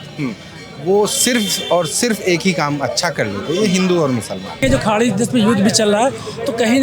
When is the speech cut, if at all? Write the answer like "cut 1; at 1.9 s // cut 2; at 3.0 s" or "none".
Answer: cut 1; at 4.6 s